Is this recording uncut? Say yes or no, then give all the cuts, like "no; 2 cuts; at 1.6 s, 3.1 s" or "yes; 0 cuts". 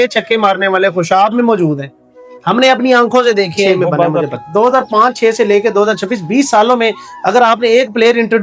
no; 1 cut; at 4.3 s